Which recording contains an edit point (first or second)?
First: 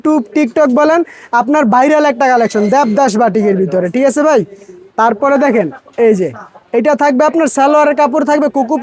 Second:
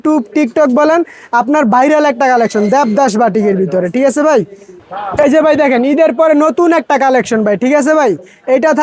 second